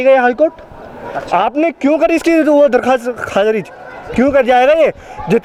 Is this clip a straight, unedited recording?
yes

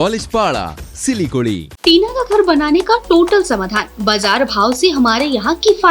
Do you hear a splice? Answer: yes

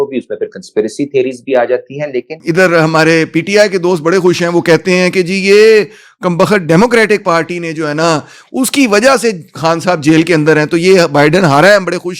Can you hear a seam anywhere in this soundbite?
yes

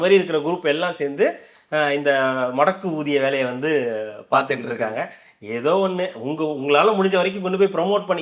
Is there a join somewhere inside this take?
no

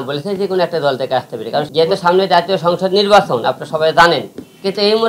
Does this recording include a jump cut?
yes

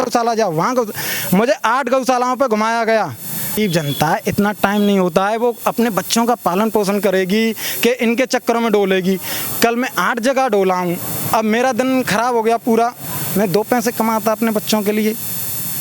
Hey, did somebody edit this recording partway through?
yes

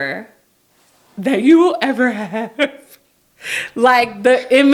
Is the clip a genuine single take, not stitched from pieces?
yes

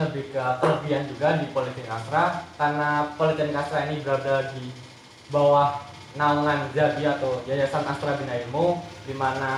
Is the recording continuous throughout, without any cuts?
yes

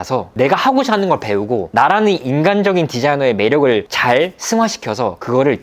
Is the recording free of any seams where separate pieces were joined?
yes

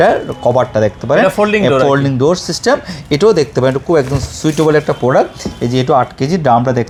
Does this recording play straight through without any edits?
yes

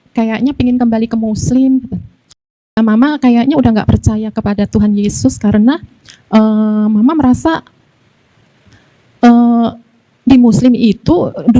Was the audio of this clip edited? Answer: yes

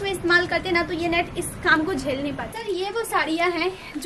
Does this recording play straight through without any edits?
no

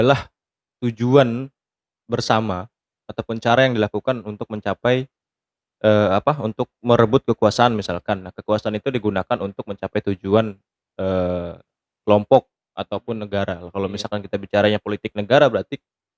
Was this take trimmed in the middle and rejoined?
no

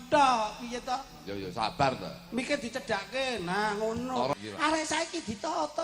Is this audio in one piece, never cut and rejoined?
no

